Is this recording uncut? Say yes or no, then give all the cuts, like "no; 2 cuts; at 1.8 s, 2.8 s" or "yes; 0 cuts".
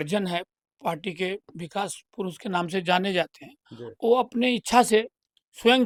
yes; 0 cuts